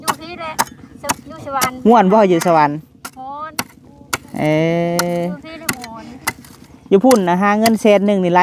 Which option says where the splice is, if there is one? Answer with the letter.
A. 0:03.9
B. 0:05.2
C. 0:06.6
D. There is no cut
D